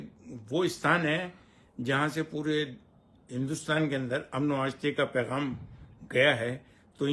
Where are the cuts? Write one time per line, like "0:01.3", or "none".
none